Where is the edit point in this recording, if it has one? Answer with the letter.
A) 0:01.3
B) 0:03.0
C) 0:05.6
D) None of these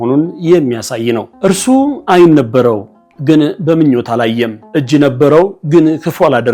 A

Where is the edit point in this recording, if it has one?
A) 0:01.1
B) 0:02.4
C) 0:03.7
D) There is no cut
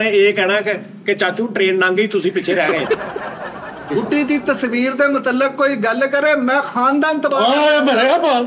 C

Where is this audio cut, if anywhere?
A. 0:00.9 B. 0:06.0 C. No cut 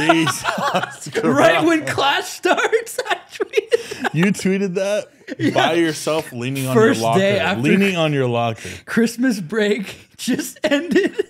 C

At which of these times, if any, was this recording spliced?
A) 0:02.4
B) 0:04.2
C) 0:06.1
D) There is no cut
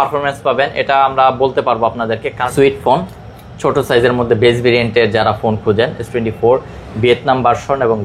A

